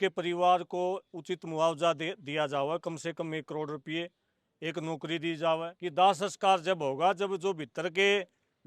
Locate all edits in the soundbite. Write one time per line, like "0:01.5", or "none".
0:05.7